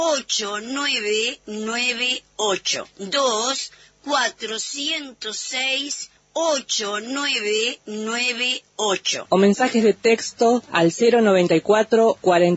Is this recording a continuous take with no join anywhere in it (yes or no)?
yes